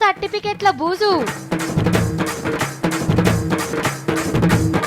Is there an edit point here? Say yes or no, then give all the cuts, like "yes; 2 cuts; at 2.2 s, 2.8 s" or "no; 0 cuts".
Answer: yes; 1 cut; at 3.7 s